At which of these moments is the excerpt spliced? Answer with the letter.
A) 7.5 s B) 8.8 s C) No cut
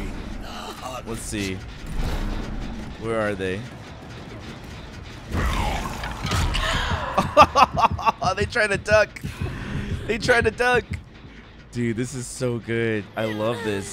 C